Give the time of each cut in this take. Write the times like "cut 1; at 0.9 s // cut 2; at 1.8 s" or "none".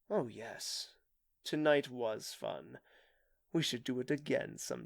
none

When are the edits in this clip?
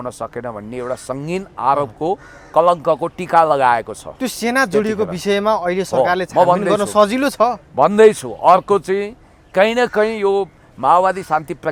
none

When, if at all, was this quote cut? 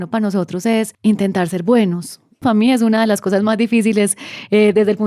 cut 1; at 0.9 s // cut 2; at 2.4 s

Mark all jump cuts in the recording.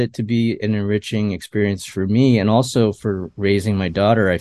cut 1; at 3.3 s

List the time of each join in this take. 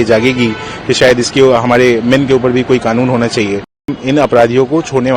cut 1; at 3.9 s

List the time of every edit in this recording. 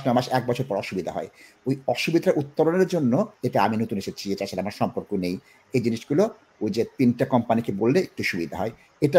cut 1; at 3.4 s

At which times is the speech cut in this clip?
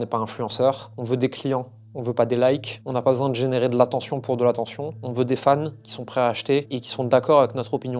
cut 1; at 0.9 s

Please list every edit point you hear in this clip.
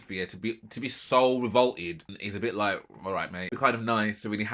cut 1; at 2.2 s // cut 2; at 3.4 s

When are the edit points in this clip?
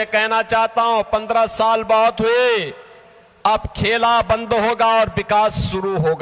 none

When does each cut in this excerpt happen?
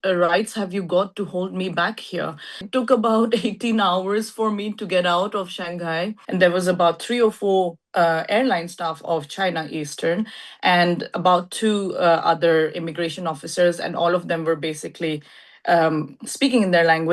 cut 1; at 2.6 s // cut 2; at 6.2 s

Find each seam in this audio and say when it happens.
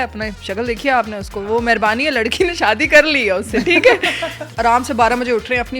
cut 1; at 4.5 s

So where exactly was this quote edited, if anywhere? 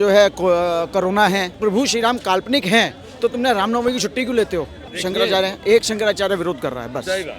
cut 1; at 1.5 s // cut 2; at 4.8 s

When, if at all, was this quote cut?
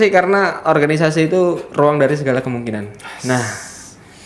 none

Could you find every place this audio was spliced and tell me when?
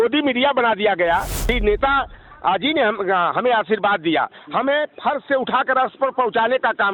cut 1; at 1.4 s

